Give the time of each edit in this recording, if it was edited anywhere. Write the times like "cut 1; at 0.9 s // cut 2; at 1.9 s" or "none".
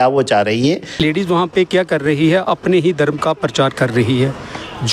cut 1; at 1.0 s